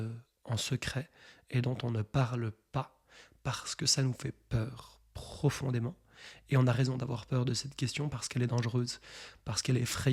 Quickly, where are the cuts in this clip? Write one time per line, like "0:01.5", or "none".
none